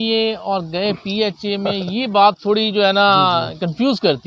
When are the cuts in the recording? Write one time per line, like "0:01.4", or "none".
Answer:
none